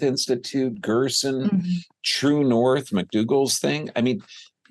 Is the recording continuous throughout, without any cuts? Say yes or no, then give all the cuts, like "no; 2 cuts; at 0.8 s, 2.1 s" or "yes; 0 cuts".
yes; 0 cuts